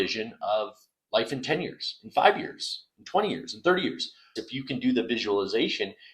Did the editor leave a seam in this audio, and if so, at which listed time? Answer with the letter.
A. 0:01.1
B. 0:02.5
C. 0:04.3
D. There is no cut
C